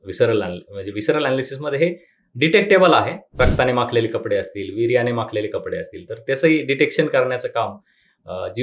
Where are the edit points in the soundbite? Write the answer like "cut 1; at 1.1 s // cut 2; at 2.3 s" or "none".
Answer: cut 1; at 3.4 s